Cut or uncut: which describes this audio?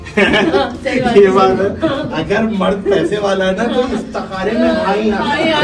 uncut